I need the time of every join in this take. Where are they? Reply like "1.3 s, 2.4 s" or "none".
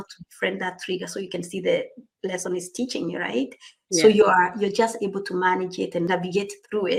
none

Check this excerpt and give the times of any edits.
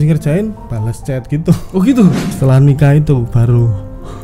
2.3 s

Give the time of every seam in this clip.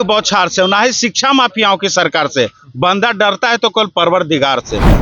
none

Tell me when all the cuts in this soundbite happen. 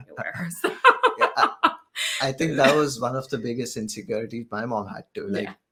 none

